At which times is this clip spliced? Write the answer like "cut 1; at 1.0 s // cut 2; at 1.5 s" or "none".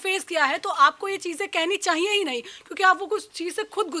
none